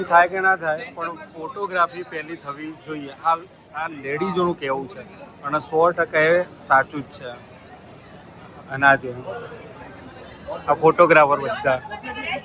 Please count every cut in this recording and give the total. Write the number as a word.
zero